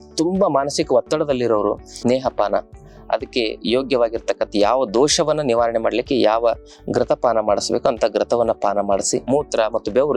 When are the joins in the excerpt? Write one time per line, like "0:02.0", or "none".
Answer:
0:02.0
0:09.2